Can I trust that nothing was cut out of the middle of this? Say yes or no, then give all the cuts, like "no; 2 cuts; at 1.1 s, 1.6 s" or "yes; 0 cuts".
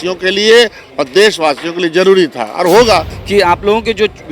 no; 1 cut; at 3.2 s